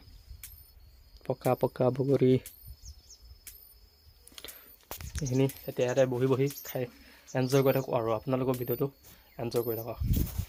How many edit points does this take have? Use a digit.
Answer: 0